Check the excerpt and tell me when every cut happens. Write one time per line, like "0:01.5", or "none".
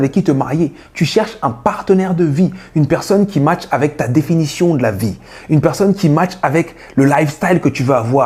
none